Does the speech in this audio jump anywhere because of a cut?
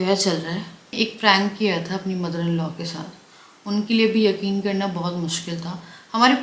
yes; 1 cut; at 0.9 s

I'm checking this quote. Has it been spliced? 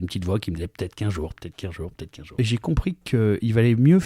yes; 1 cut; at 2.3 s

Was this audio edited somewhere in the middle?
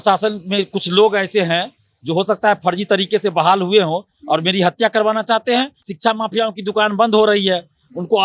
yes; 1 cut; at 5.8 s

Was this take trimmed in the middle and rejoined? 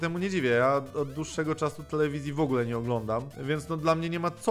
yes; 1 cut; at 3.3 s

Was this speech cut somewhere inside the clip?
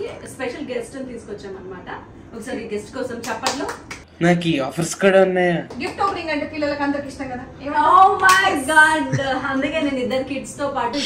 no; 0 cuts

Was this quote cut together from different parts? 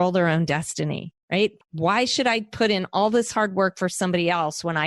yes; 1 cut; at 1.4 s

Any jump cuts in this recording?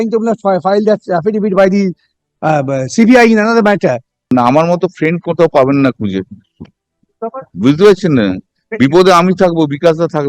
yes; 1 cut; at 4.3 s

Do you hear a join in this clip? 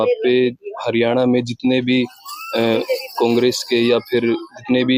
no; 0 cuts

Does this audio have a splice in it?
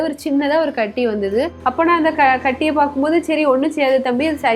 yes; 1 cut; at 1.6 s

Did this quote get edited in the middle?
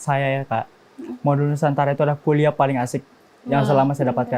no; 0 cuts

